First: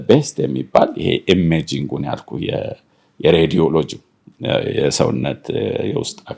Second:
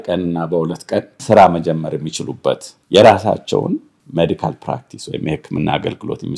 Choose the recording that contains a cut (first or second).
second